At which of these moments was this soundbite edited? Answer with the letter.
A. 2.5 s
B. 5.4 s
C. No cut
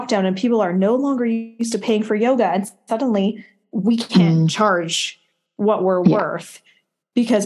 C